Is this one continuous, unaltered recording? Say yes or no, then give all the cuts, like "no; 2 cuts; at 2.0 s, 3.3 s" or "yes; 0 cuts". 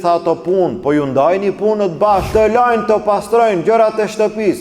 no; 1 cut; at 2.3 s